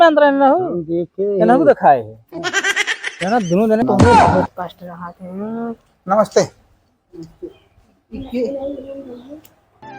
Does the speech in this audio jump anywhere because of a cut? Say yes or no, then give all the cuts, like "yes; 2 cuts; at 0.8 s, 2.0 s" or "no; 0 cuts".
yes; 1 cut; at 3.8 s